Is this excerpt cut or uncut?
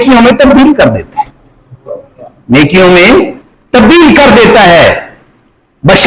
uncut